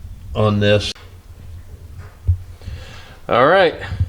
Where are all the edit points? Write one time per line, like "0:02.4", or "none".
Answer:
0:01.0